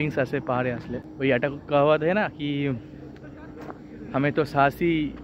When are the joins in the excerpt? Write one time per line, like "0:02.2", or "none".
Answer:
0:01.0